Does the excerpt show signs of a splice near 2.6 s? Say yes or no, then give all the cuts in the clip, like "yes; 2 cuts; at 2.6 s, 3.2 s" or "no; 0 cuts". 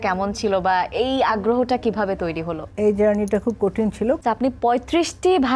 yes; 2 cuts; at 2.6 s, 4.2 s